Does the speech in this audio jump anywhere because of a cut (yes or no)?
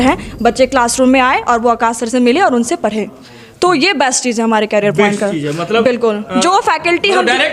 no